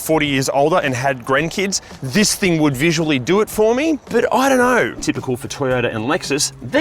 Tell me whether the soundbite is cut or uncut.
cut